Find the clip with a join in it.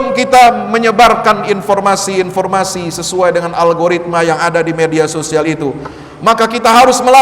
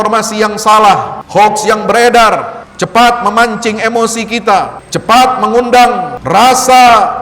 second; 4 cuts; at 1.2 s, 2.6 s, 4.8 s, 6.1 s

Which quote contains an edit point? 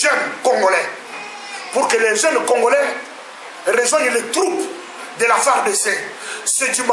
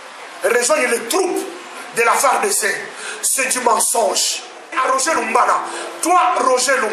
second; 1 cut; at 5.0 s

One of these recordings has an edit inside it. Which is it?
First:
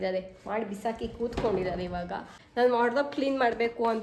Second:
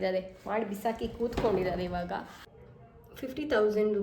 second; 1 cut; at 2.4 s

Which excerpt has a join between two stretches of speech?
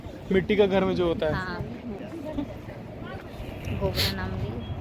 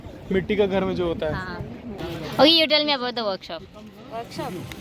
second; 1 cut; at 2.0 s

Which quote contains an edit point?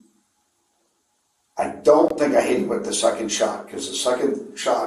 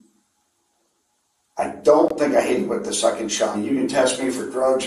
second; 1 cut; at 3.6 s

